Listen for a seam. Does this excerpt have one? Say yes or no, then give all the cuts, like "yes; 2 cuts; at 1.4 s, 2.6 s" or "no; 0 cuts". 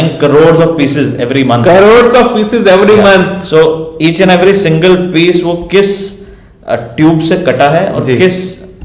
no; 0 cuts